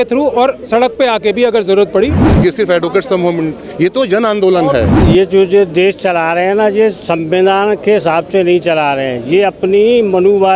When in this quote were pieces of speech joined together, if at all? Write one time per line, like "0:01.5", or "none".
0:02.2
0:04.9

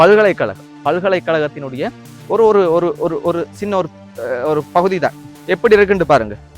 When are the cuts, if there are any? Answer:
0:05.3

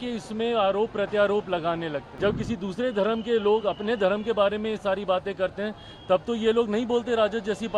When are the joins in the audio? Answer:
0:02.1

